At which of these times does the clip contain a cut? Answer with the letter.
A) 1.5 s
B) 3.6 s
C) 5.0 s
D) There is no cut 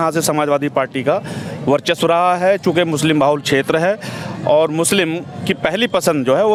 D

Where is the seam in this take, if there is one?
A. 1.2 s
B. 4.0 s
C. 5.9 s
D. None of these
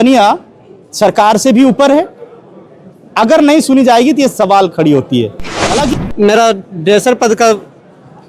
C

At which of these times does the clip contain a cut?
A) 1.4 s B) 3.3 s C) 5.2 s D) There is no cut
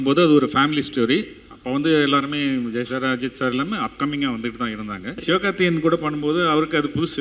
C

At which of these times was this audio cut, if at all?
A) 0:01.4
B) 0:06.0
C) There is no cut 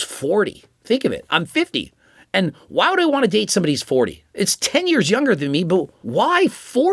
B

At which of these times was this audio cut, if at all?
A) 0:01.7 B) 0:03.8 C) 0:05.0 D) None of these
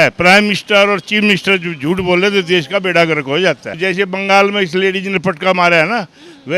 B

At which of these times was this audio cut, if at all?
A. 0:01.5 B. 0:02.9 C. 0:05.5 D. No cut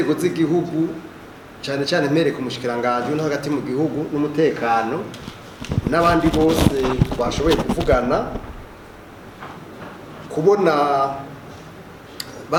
D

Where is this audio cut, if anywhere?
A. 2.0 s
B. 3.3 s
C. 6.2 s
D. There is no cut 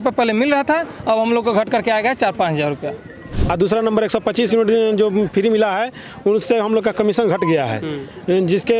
B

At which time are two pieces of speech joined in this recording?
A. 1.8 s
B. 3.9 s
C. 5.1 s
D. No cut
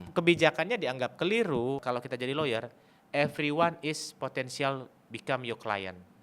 A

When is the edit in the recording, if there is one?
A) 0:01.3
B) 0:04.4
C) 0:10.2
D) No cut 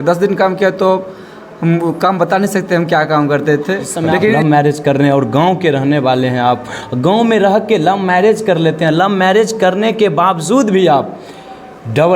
B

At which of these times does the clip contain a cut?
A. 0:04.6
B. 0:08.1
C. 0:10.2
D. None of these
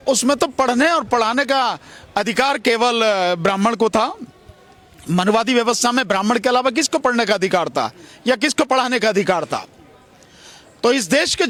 D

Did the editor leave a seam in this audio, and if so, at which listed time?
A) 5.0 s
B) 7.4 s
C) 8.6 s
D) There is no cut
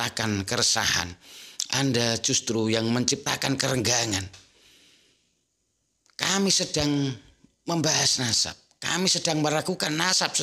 D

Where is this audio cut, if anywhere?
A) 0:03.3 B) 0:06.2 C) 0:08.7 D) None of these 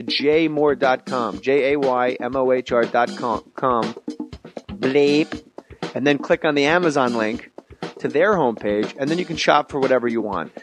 B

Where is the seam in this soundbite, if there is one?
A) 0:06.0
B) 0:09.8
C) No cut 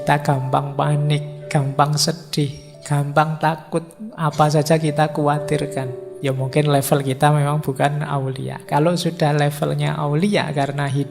A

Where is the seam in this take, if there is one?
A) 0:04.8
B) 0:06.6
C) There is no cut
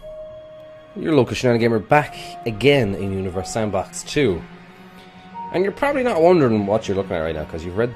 A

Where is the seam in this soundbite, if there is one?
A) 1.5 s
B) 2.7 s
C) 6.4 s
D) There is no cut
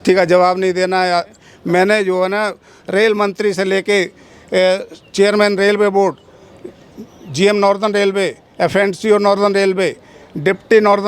A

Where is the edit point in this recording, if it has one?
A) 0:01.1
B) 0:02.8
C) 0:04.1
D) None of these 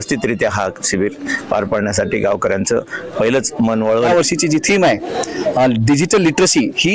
C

